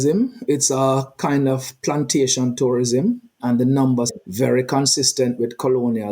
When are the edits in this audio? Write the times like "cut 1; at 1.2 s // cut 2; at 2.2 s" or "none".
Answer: cut 1; at 3.4 s // cut 2; at 4.2 s